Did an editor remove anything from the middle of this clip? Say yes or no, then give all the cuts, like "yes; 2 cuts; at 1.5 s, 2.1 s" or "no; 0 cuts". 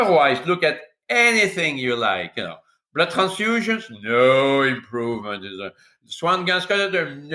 no; 0 cuts